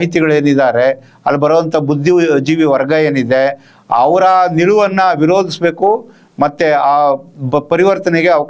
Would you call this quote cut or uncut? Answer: uncut